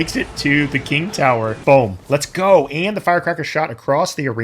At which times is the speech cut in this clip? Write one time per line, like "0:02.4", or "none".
0:01.6